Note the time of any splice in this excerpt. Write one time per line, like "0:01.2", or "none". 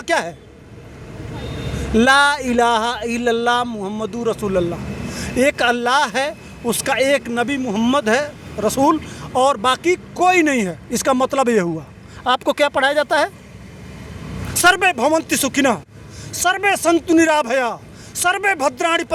none